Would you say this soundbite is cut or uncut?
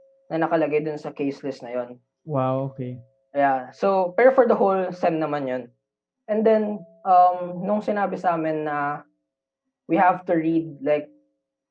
uncut